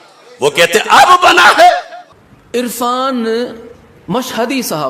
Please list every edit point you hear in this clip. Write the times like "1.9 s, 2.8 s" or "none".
none